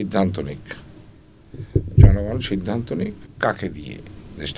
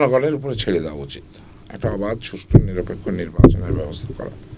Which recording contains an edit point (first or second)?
first